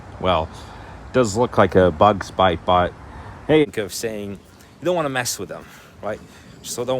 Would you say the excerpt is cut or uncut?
cut